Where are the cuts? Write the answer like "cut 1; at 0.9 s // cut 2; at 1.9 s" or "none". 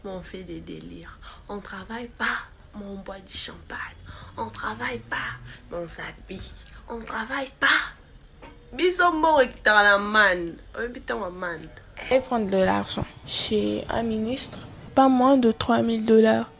cut 1; at 12.1 s